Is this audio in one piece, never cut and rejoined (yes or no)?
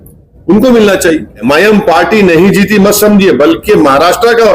no